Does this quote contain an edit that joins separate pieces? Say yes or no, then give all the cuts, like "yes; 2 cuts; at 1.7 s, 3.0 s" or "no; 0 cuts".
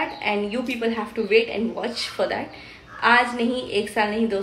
no; 0 cuts